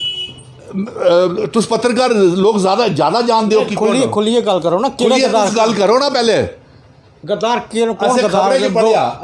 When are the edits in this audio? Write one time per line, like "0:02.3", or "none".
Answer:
none